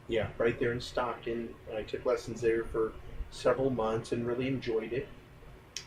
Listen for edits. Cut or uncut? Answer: uncut